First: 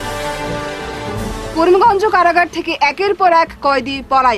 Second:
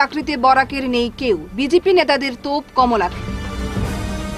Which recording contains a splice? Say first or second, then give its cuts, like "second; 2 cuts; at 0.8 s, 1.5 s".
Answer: first; 1 cut; at 1.1 s